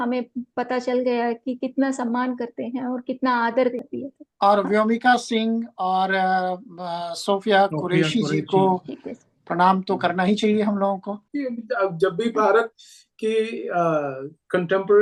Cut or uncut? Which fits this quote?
cut